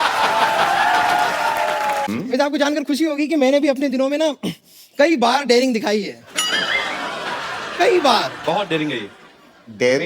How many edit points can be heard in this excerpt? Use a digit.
1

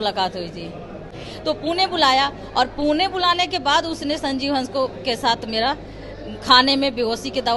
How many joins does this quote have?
1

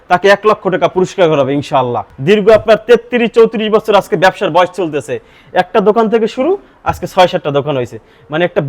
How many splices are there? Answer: 1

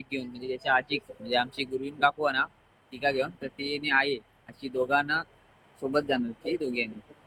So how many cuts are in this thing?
0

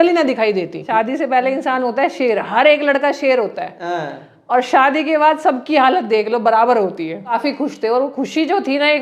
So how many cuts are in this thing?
2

